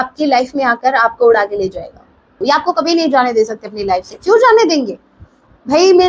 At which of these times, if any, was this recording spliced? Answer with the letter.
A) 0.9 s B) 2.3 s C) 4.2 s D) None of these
B